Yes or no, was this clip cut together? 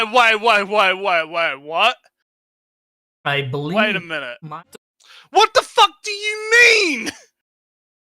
yes